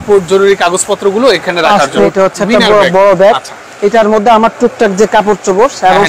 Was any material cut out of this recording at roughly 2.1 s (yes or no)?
yes